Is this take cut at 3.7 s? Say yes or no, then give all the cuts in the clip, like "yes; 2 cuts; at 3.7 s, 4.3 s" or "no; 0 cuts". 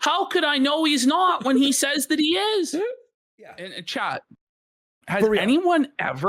yes; 1 cut; at 3.7 s